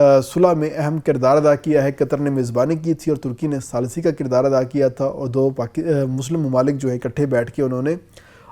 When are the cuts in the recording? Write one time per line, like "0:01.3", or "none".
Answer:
none

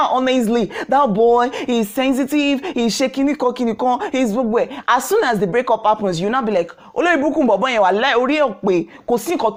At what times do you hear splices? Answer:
none

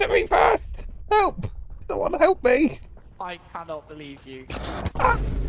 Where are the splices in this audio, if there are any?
0:04.6

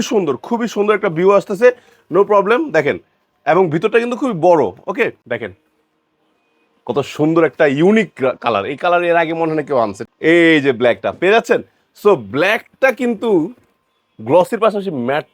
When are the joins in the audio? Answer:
0:05.3
0:10.0

